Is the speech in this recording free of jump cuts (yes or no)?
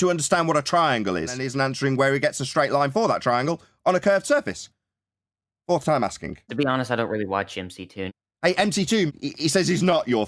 no